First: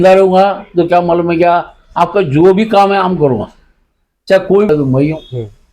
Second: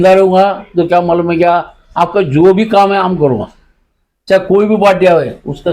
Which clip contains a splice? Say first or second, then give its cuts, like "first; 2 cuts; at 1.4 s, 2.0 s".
first; 1 cut; at 4.7 s